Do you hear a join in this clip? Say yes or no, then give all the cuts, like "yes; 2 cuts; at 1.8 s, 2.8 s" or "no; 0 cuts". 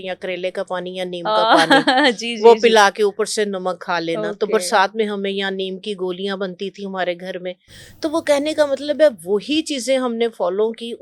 no; 0 cuts